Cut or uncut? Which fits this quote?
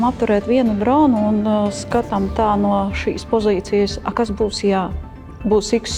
uncut